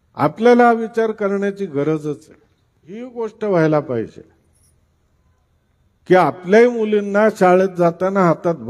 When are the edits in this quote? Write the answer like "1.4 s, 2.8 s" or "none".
3.1 s